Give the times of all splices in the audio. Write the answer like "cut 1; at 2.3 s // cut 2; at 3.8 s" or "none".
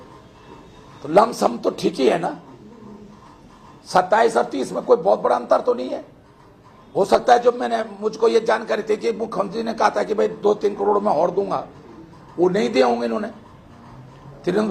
none